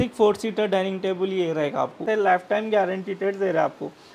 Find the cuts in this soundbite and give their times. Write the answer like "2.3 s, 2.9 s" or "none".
2.0 s